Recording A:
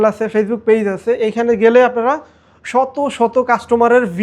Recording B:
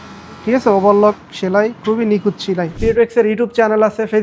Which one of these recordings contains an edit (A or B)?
B